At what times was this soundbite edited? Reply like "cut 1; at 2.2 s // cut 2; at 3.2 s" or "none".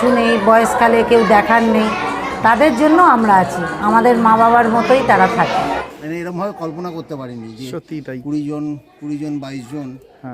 cut 1; at 5.8 s